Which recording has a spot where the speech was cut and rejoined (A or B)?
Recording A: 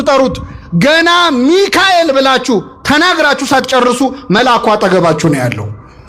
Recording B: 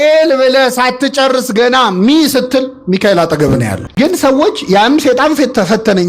B